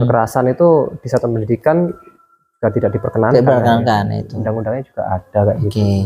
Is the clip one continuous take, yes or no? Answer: yes